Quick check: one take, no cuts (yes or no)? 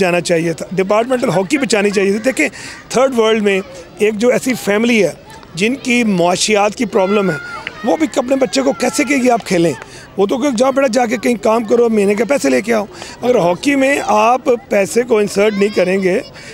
yes